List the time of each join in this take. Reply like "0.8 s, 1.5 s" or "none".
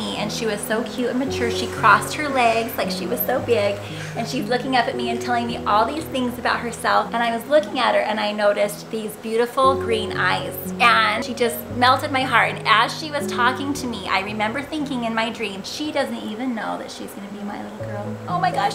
none